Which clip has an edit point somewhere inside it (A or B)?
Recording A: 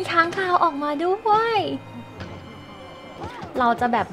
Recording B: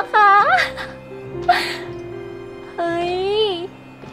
A